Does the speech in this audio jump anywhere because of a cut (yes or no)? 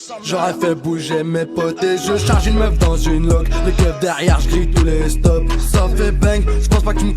no